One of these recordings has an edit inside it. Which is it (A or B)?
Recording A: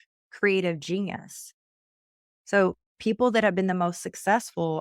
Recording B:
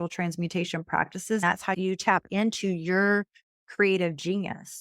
B